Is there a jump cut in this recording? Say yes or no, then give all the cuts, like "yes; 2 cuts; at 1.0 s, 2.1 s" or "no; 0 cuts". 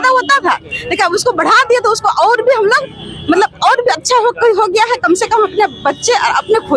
no; 0 cuts